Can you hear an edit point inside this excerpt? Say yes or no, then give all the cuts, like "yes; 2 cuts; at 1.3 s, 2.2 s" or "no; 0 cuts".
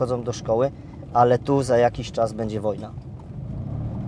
no; 0 cuts